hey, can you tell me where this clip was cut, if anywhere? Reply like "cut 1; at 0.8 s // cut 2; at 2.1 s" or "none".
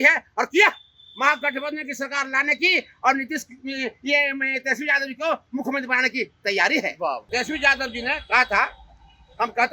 cut 1; at 7.2 s